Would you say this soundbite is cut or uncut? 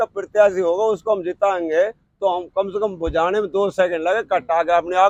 uncut